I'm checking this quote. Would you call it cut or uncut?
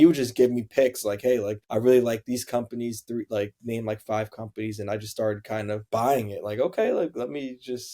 uncut